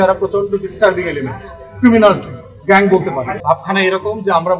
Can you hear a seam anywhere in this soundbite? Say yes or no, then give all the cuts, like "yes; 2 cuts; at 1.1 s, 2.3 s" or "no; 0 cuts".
yes; 1 cut; at 3.3 s